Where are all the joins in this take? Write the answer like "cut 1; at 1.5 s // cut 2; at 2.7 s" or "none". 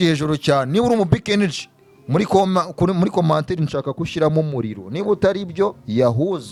none